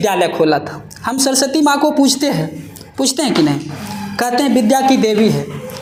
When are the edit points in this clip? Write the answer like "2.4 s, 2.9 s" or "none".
none

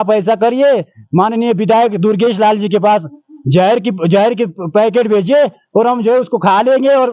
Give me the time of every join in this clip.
none

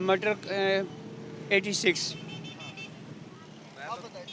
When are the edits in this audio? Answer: none

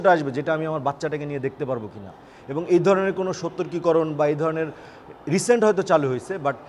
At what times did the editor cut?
none

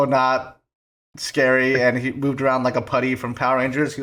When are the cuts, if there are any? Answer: none

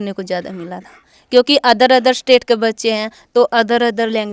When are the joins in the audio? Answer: none

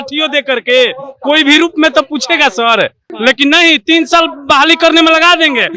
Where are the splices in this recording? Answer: 3.1 s

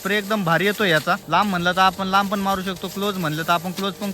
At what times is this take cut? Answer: 1.2 s

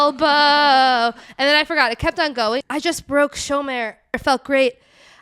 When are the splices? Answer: 2.7 s, 4.2 s

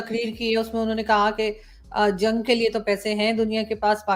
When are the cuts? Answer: none

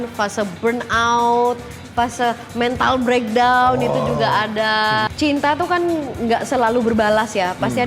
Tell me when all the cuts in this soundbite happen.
5.1 s

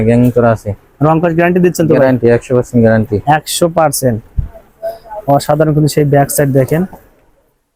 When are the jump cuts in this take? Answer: none

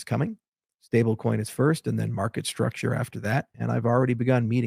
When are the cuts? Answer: 3.5 s

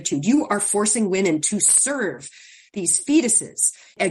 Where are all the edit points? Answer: none

